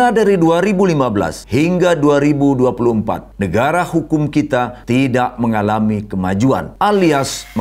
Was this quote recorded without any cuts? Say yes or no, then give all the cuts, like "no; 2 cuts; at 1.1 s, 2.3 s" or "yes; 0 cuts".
no; 4 cuts; at 1.4 s, 3.3 s, 4.8 s, 6.7 s